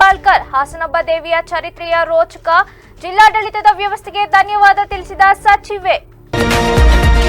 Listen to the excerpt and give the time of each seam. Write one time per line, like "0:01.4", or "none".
0:06.3